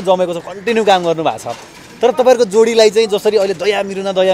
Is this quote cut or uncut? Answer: uncut